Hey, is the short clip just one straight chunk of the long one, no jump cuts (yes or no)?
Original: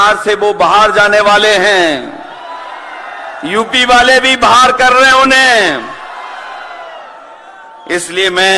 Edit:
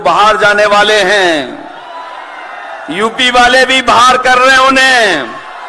yes